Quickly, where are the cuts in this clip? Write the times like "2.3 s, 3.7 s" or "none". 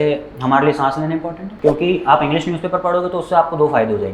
1.4 s

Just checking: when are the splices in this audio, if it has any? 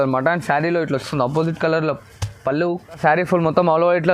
3.0 s

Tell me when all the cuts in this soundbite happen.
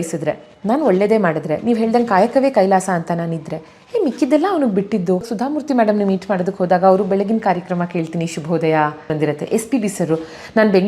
5.3 s, 9.1 s

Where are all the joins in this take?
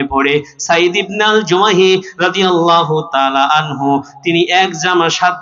none

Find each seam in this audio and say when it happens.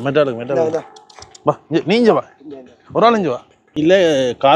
3.6 s

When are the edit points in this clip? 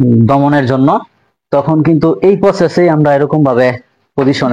none

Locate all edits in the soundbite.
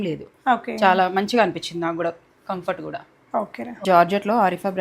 3.8 s

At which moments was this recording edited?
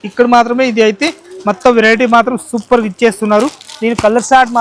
none

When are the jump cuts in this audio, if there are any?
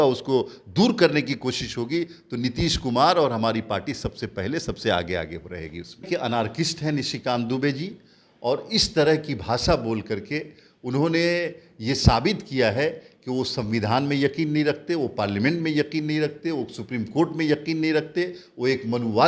6.1 s

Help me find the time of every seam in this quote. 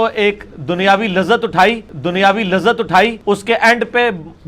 3.2 s

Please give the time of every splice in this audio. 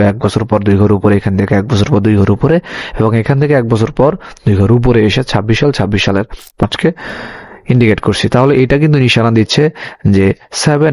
6.6 s

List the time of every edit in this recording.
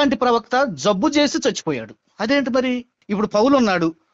2.9 s

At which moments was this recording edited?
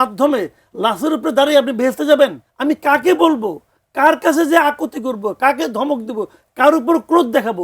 2.5 s

